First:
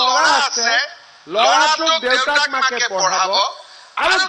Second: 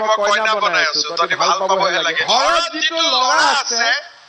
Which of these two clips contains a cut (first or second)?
second